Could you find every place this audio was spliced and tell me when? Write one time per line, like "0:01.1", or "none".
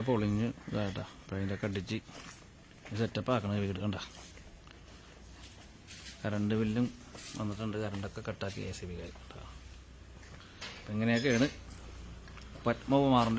none